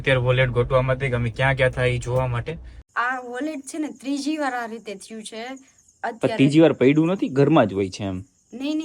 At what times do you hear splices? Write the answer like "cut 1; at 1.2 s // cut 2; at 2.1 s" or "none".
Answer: cut 1; at 2.8 s

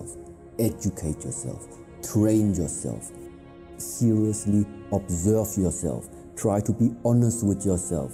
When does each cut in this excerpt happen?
none

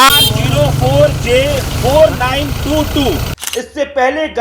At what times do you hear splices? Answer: cut 1; at 3.3 s

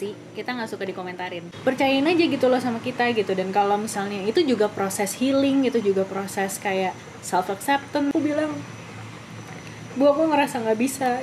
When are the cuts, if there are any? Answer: cut 1; at 1.5 s // cut 2; at 8.1 s

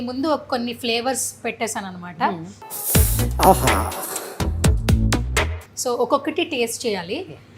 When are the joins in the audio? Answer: none

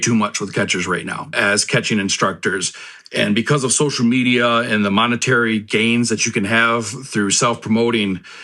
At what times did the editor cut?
cut 1; at 1.2 s

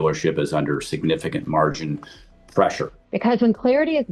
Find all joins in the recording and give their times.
cut 1; at 3.0 s

